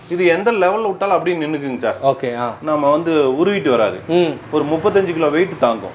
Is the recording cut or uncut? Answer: uncut